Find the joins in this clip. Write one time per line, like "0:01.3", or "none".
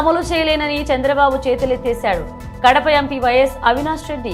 none